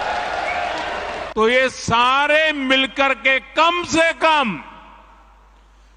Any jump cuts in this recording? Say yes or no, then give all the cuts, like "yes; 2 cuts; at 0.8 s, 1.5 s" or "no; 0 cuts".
yes; 1 cut; at 1.2 s